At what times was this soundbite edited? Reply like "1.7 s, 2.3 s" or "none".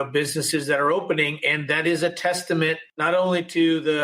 2.9 s